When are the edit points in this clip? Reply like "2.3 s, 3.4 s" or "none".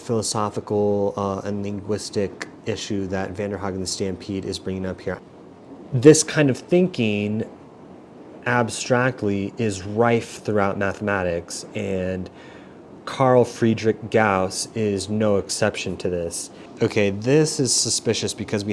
5.1 s, 16.6 s

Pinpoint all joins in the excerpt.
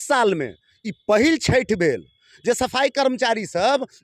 none

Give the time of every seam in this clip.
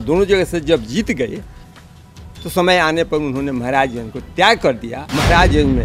4.9 s

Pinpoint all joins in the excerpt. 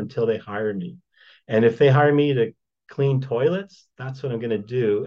none

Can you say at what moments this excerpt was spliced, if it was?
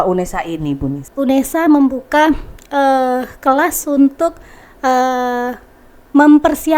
1.0 s

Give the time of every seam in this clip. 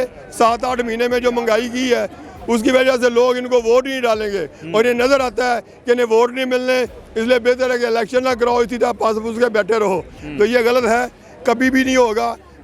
none

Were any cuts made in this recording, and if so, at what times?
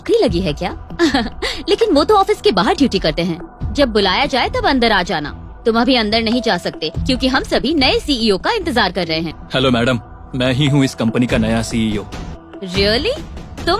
9.4 s, 12.3 s

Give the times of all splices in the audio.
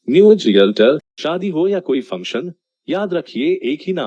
1.1 s

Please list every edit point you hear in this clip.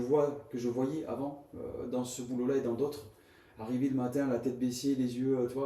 none

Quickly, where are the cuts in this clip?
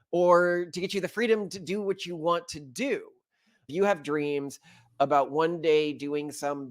3.7 s

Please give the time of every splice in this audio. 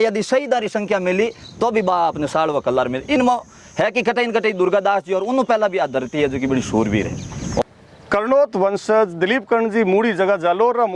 7.6 s

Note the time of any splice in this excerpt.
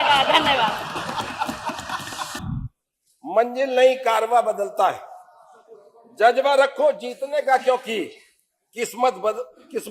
2.4 s

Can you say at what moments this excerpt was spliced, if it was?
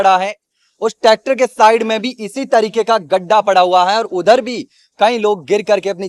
none

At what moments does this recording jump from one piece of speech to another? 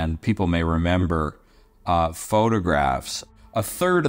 3.2 s

